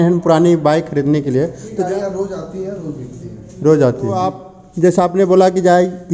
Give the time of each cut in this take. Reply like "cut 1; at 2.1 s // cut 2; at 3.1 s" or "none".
cut 1; at 1.7 s // cut 2; at 4.6 s